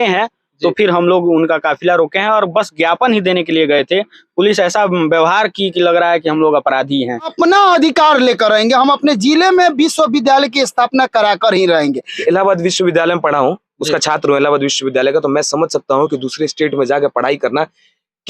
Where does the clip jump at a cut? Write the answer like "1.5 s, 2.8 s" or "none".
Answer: 7.3 s, 12.2 s